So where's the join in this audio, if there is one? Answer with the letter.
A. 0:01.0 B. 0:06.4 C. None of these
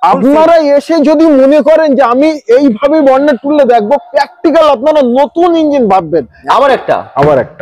B